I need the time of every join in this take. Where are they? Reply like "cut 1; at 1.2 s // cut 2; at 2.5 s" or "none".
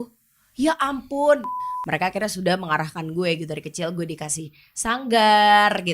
cut 1; at 1.6 s